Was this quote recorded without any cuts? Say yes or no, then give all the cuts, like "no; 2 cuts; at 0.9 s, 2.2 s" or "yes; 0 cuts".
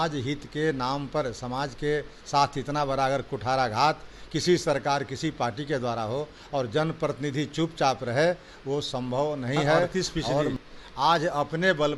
no; 1 cut; at 10.5 s